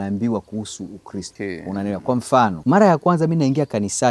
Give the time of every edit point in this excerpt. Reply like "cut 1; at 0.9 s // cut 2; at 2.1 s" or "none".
cut 1; at 1.3 s // cut 2; at 2.6 s